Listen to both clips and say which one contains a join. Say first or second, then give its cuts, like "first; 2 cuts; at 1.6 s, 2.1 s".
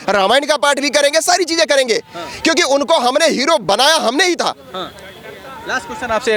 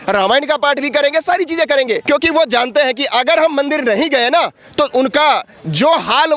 second; 1 cut; at 2.0 s